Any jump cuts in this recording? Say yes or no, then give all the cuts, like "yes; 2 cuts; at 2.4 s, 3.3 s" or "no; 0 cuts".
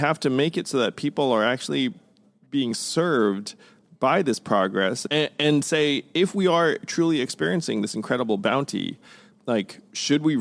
yes; 1 cut; at 5.0 s